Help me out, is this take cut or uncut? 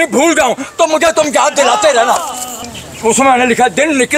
cut